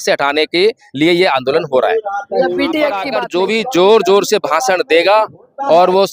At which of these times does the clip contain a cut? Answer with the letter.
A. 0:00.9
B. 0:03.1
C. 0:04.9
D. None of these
B